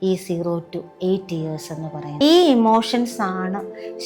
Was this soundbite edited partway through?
yes; 1 cut; at 2.2 s

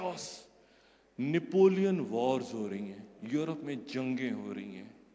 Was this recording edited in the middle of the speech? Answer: no; 0 cuts

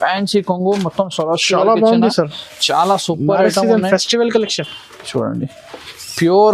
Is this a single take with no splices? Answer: yes; 0 cuts

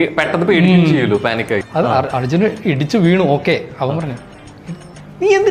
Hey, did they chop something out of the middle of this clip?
yes; 1 cut; at 1.6 s

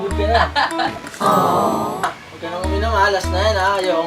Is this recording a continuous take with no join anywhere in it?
no; 1 cut; at 2.2 s

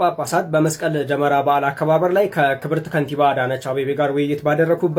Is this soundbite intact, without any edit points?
yes; 0 cuts

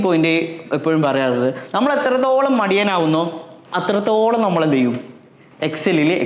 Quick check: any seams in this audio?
no; 0 cuts

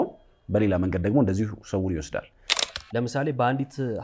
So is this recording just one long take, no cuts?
no; 1 cut; at 2.5 s

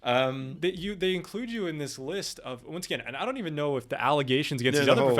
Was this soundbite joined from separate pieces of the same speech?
no; 0 cuts

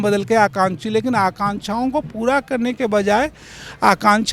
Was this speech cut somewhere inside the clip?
no; 0 cuts

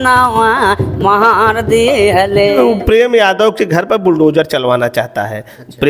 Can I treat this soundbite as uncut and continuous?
no; 1 cut; at 2.5 s

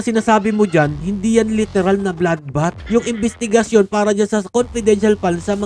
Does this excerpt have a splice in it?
yes; 1 cut; at 2.8 s

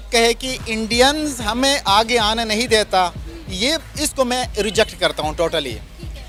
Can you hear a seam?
no; 0 cuts

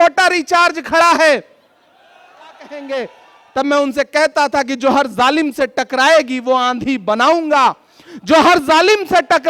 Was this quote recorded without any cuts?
no; 1 cut; at 2.8 s

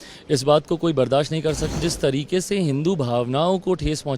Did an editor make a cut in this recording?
yes; 1 cut; at 1.8 s

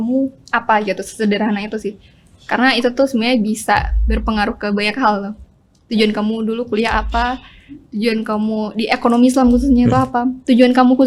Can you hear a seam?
no; 0 cuts

